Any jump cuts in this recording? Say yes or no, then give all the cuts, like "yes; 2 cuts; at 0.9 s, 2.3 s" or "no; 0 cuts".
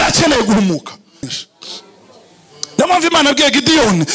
yes; 1 cut; at 1.3 s